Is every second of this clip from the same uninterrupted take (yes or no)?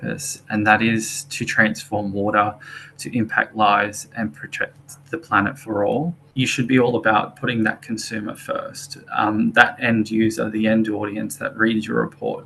no